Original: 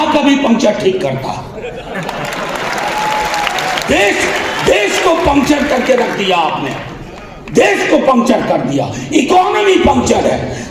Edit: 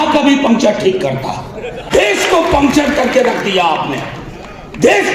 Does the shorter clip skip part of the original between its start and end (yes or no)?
yes